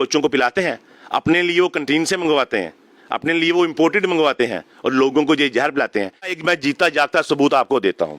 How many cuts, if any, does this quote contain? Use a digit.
1